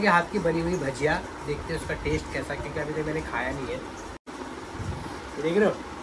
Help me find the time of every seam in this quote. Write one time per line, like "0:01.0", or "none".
none